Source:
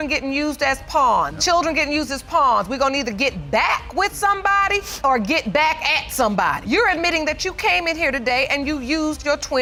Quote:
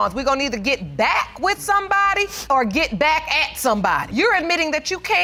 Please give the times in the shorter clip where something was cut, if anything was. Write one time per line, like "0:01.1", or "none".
none

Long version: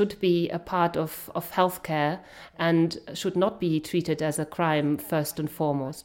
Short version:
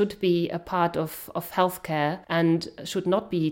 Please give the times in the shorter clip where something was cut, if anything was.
0:02.2

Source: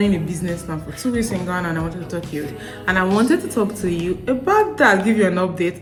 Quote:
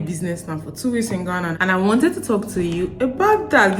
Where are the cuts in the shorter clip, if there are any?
0:01.5

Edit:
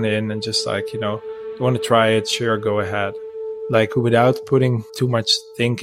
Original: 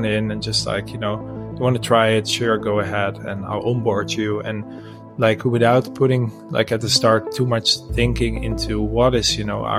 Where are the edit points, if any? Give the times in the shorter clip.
0:03.3
0:04.9

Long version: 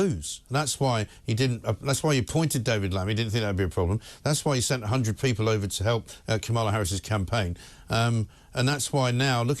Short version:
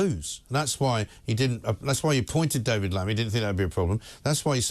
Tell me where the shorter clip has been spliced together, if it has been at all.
none

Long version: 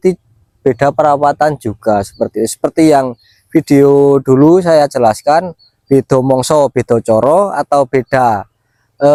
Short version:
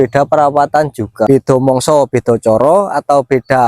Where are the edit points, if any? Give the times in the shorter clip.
0:01.3

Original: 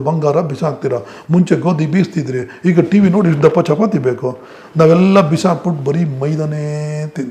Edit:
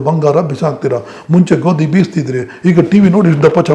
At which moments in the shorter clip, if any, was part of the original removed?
none

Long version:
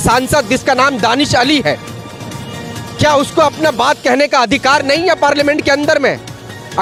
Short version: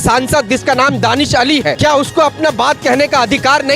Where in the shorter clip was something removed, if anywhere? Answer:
0:01.8

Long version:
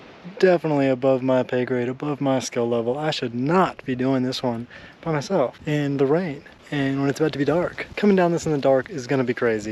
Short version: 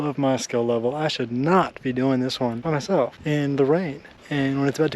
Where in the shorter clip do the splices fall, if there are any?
0:02.6

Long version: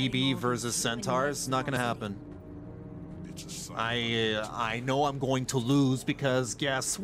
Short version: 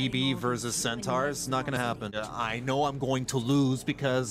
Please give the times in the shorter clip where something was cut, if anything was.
0:02.2

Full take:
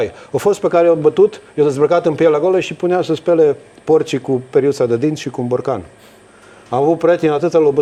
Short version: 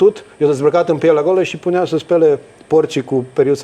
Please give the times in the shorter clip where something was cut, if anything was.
none

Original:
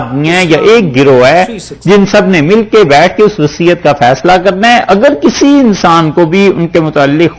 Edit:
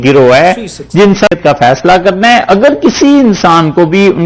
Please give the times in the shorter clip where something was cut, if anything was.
0:01.3

